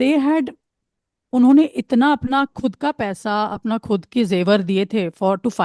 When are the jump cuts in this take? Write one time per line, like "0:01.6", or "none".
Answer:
none